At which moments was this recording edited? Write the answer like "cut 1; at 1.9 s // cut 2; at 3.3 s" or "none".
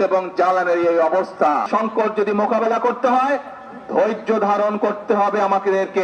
cut 1; at 1.7 s

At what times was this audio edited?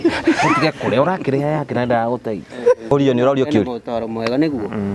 cut 1; at 2.9 s

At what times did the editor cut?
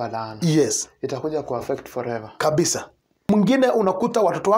cut 1; at 3.1 s

